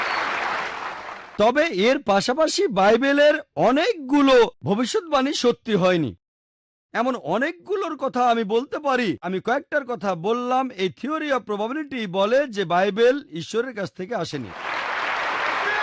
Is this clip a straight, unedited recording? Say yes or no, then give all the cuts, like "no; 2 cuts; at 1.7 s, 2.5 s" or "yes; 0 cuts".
no; 3 cuts; at 1.2 s, 9.2 s, 14.6 s